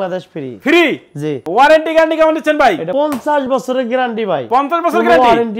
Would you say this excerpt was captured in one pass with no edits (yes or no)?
no